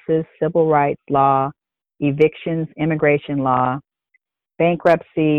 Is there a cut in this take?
no; 0 cuts

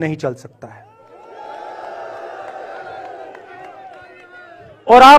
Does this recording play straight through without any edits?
yes; 0 cuts

